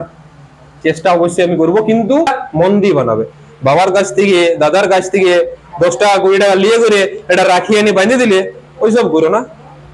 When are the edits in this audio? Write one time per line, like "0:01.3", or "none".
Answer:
0:02.3